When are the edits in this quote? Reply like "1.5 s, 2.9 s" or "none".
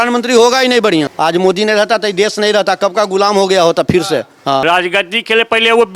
1.1 s, 4.6 s